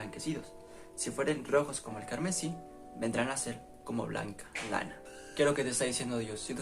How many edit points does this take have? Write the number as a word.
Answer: one